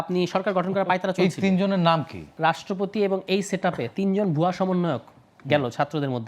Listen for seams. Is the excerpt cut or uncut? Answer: cut